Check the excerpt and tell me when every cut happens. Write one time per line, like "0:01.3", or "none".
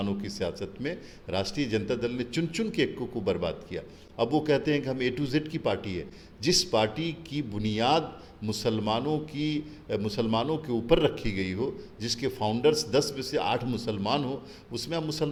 none